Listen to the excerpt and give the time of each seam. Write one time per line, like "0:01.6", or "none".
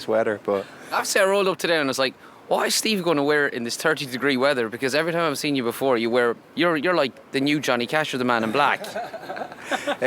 none